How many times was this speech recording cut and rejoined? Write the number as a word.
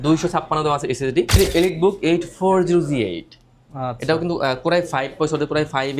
one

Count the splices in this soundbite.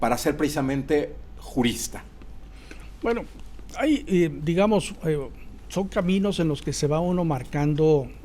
zero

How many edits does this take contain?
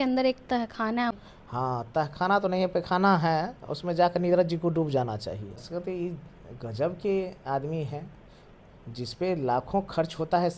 two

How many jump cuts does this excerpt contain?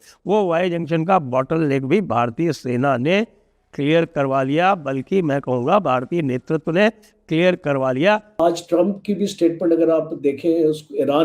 one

